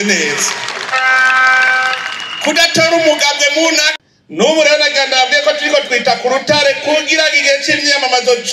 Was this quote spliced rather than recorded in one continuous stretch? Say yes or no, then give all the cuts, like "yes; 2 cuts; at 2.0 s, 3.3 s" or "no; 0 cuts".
yes; 1 cut; at 3.9 s